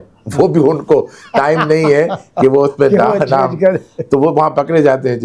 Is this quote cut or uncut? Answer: uncut